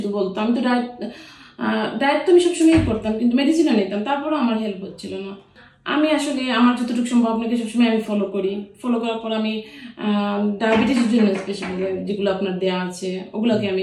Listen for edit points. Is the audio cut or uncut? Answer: uncut